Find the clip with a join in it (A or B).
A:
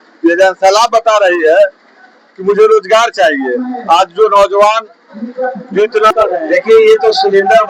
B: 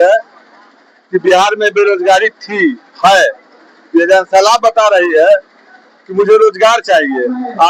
A